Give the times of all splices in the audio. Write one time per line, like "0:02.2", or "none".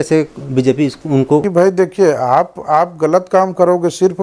0:01.4